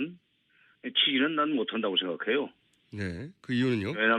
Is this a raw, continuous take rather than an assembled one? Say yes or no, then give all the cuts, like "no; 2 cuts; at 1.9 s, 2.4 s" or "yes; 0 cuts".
yes; 0 cuts